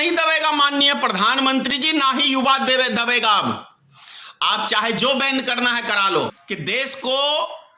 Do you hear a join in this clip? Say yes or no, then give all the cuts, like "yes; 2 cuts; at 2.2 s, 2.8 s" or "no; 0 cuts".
yes; 1 cut; at 6.4 s